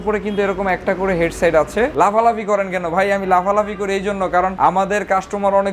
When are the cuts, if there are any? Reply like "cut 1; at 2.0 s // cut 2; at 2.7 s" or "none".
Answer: cut 1; at 1.9 s